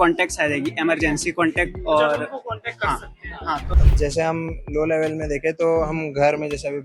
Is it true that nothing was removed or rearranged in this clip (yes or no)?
no